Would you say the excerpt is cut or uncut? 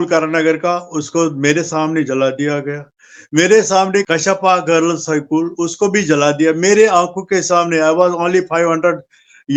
uncut